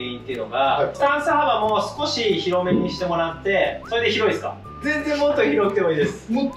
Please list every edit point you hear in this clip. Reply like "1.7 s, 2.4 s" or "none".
1.0 s, 3.8 s, 4.8 s